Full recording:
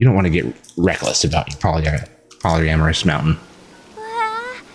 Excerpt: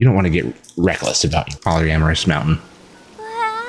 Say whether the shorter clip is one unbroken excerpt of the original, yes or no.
no